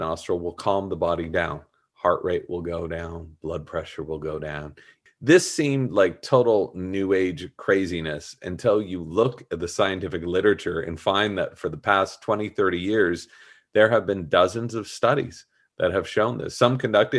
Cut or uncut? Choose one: cut